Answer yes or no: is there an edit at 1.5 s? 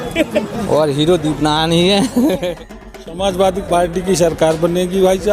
no